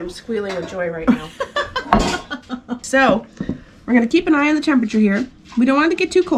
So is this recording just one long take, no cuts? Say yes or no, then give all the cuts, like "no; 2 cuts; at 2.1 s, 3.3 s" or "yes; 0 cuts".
yes; 0 cuts